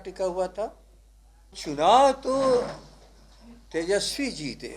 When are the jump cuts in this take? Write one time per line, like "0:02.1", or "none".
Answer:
0:01.6